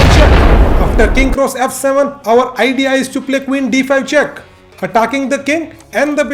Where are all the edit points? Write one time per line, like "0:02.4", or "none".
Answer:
none

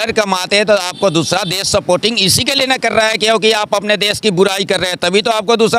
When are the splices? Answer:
none

